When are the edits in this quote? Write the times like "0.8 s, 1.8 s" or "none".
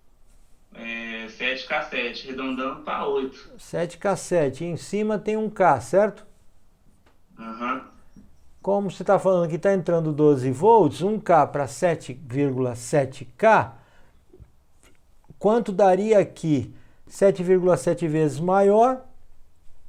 none